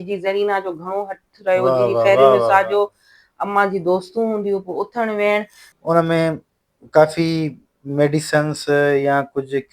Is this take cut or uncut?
cut